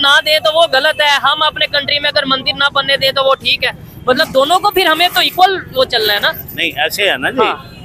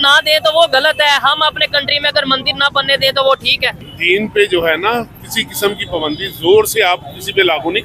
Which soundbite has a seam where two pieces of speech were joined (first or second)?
second